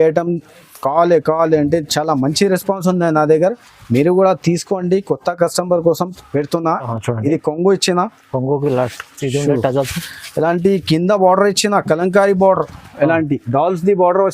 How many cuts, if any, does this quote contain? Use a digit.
1